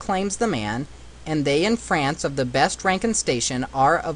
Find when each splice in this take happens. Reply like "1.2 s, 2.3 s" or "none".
2.3 s